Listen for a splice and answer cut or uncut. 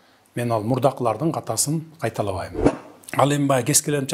cut